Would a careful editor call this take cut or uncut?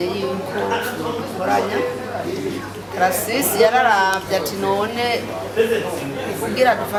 uncut